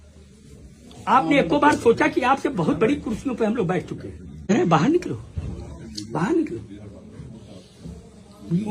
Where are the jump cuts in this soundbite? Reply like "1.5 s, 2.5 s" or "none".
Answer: 4.5 s